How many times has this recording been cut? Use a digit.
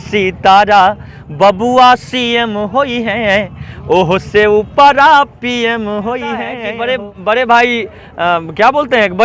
1